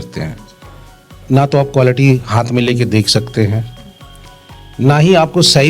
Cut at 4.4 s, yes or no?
no